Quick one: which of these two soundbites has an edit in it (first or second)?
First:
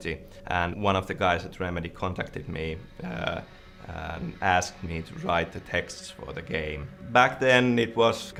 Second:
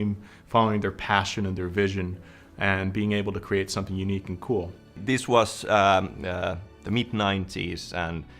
second